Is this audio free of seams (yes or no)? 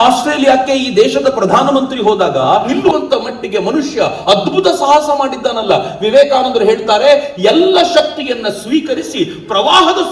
no